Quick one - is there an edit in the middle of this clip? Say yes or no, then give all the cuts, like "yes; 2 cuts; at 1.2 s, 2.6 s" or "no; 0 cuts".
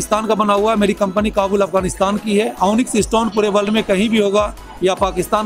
no; 0 cuts